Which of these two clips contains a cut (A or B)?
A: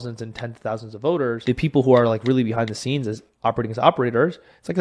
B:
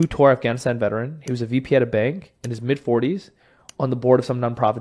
A